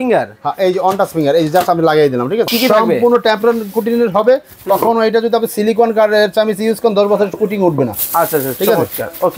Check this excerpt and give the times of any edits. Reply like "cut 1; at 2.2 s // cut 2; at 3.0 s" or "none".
cut 1; at 2.5 s